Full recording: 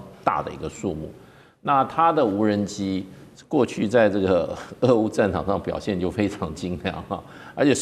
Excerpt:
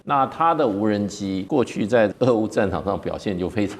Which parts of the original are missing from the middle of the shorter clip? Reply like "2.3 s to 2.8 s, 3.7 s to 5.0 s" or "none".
3.4 s to 4.5 s